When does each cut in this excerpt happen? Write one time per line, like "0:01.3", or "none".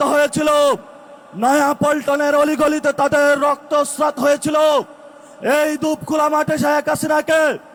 none